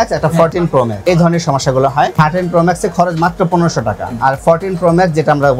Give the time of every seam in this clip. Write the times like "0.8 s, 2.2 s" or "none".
1.0 s, 2.1 s, 4.1 s